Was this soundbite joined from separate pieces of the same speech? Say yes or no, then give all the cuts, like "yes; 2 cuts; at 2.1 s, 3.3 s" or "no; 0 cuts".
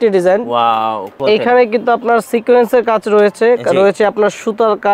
yes; 1 cut; at 1.1 s